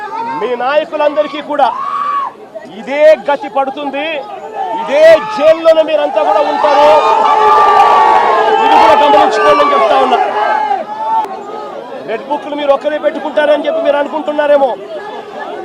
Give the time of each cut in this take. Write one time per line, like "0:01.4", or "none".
0:11.3